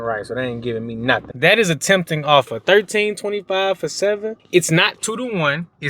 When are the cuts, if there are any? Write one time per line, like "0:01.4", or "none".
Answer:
0:01.3
0:04.3